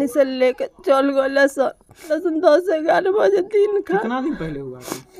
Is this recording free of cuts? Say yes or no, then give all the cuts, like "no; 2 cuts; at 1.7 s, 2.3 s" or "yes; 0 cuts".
no; 1 cut; at 2.1 s